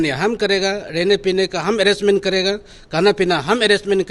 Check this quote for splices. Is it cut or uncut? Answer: uncut